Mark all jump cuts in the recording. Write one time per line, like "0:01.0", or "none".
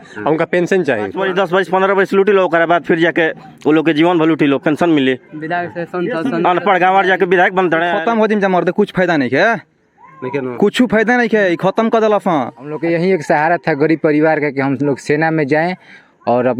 0:01.2
0:07.9
0:12.8

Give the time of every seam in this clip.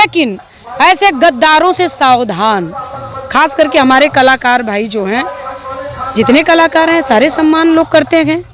none

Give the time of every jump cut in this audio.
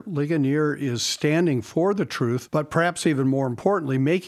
0:02.4

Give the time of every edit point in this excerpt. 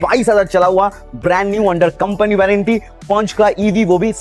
none

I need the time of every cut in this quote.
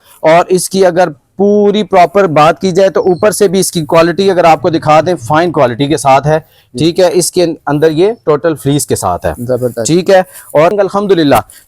0:10.7

